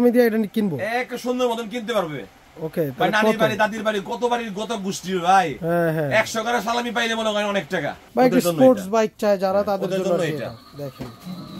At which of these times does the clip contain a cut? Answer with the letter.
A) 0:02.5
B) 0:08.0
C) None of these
B